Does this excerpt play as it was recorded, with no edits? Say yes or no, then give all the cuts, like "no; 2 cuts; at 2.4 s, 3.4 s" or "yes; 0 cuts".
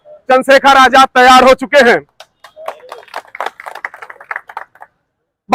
yes; 0 cuts